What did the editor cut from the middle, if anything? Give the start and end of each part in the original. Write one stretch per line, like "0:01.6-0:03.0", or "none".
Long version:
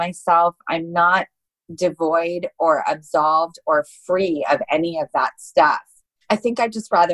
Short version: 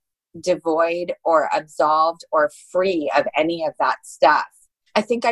none